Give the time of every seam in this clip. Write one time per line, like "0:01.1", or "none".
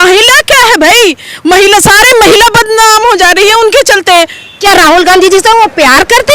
0:04.6